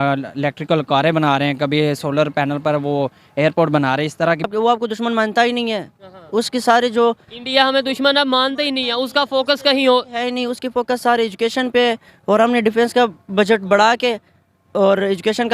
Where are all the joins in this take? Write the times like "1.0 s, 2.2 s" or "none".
4.5 s